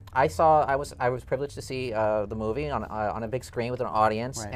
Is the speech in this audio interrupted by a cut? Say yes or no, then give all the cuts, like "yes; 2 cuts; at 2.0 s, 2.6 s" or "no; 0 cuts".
yes; 1 cut; at 3.2 s